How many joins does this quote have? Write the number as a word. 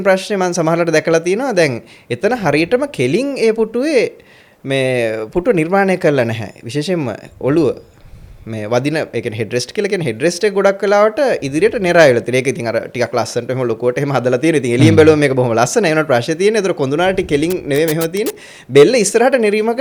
zero